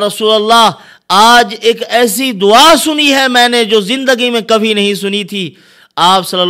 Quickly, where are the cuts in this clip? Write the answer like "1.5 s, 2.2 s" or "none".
none